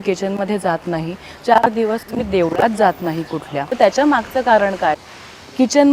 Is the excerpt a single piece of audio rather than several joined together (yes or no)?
no